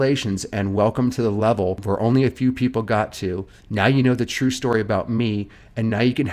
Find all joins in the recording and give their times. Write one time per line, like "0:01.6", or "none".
0:01.8